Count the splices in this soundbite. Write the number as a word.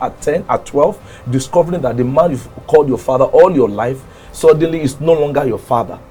zero